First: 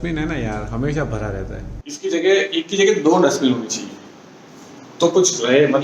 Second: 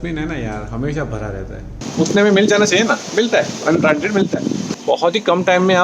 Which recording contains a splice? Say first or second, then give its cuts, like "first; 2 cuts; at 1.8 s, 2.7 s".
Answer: second; 2 cuts; at 1.8 s, 4.7 s